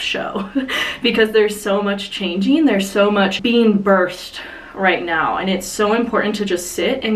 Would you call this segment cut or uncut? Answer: uncut